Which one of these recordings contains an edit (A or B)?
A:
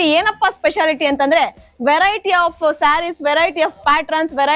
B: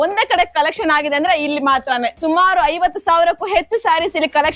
B